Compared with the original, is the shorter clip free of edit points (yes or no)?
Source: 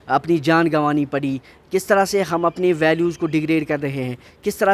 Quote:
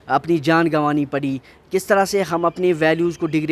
yes